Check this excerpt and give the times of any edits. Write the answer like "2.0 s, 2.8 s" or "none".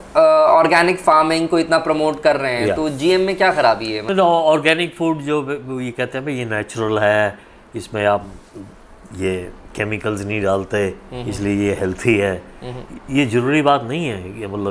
4.0 s